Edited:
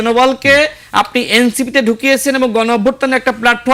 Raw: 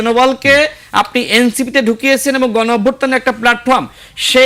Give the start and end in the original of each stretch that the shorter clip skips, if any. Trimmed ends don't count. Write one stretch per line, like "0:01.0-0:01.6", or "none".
none